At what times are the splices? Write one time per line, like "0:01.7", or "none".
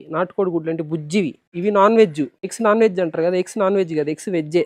0:01.4
0:02.4